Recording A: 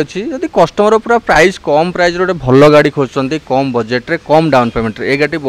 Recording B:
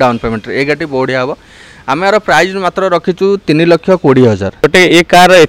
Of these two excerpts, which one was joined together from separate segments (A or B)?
B